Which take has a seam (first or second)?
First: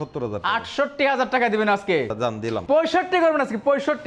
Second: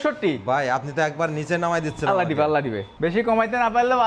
second